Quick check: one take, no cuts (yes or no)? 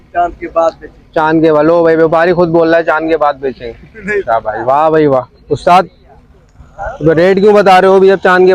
yes